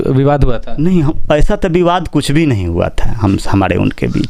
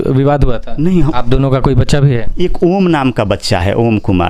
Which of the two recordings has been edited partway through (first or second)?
second